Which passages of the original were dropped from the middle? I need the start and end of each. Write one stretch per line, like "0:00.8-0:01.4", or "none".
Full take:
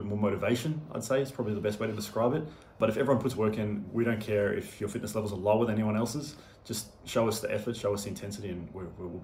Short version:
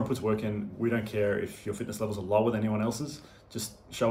none